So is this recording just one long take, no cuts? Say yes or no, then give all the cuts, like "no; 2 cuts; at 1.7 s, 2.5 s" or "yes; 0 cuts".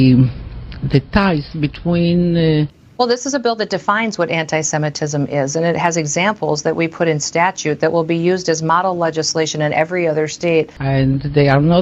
no; 2 cuts; at 2.8 s, 10.8 s